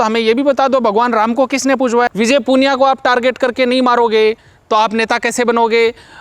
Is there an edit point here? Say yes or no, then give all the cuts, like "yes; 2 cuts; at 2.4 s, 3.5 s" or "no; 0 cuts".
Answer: yes; 1 cut; at 2.1 s